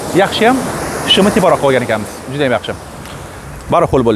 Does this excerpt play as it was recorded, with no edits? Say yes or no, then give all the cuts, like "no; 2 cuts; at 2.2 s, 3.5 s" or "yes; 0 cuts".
yes; 0 cuts